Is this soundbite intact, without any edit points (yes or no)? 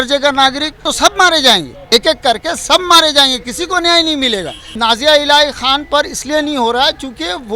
no